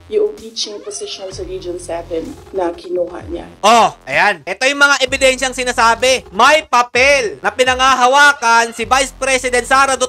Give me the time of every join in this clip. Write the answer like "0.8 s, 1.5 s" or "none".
6.3 s